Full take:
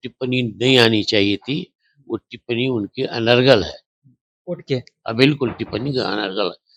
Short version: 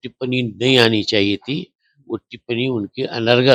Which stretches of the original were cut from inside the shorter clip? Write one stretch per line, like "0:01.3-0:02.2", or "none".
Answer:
none

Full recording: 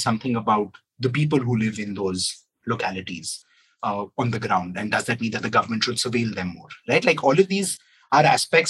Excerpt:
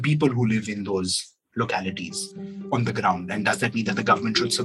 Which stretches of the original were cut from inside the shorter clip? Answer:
0:03.7-0:04.1

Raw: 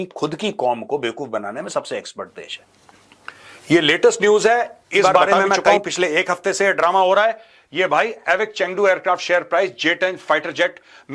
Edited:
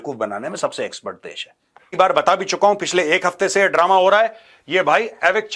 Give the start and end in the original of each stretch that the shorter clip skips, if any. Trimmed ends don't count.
0:03.1-0:05.0

